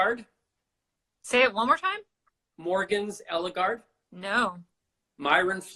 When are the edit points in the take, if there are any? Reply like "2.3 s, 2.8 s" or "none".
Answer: none